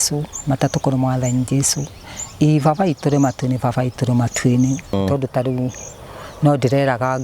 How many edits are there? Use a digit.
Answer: 1